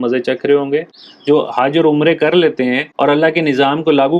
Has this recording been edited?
yes; 1 cut; at 0.9 s

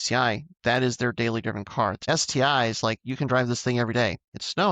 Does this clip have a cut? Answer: yes; 1 cut; at 2.0 s

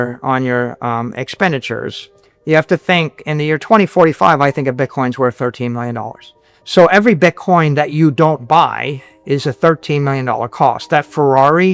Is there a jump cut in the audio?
no; 0 cuts

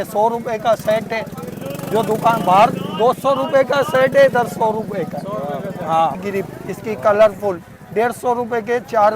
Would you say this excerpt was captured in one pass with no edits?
no; 1 cut; at 6.2 s

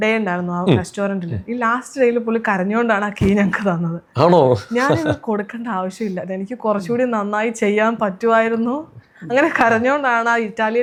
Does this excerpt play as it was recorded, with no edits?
yes; 0 cuts

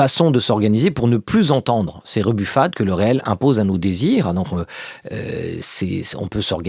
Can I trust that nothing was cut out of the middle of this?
yes; 0 cuts

